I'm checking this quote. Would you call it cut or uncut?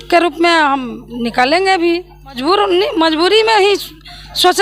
cut